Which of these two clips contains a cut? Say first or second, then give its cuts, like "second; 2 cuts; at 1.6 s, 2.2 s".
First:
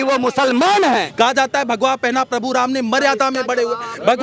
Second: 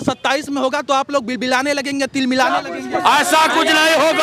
first; 1 cut; at 1.1 s